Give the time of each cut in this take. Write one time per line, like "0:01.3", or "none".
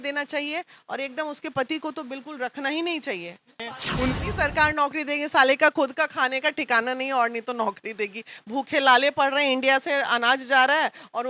0:03.7